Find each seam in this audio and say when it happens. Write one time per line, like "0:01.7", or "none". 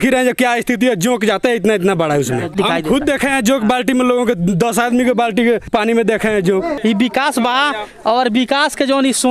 0:06.8